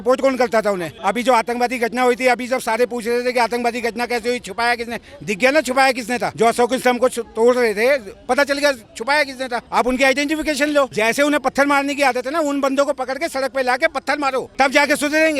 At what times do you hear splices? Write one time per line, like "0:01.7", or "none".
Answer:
0:00.9
0:06.3
0:09.6
0:10.9
0:14.5